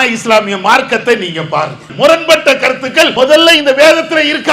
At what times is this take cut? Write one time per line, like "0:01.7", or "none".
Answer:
0:01.9
0:03.1